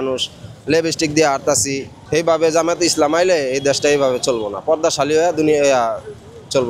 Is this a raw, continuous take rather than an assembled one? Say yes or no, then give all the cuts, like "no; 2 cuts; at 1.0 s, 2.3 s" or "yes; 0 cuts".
no; 1 cut; at 2.0 s